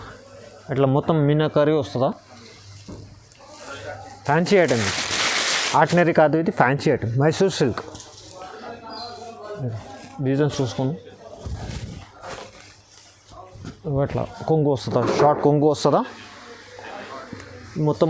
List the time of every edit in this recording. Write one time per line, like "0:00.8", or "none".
none